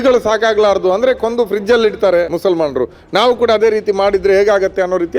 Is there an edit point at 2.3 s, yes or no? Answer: yes